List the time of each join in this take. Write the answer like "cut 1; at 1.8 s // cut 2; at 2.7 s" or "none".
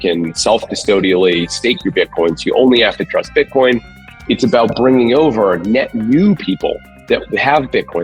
cut 1; at 3.9 s